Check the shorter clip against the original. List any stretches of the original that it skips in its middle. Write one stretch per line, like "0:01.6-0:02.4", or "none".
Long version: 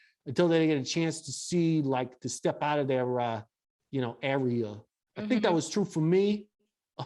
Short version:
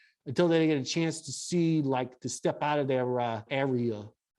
0:03.5-0:04.2